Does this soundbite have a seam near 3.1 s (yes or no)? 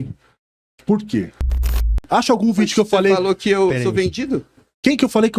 no